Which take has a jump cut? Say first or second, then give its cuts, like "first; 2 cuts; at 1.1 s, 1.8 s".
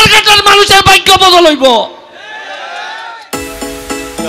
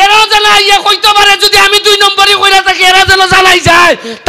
first; 1 cut; at 3.1 s